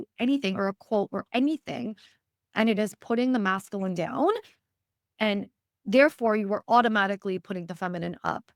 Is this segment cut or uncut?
uncut